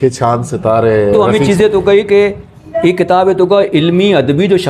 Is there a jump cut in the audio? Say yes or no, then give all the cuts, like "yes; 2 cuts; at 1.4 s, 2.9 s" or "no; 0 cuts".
yes; 1 cut; at 1.1 s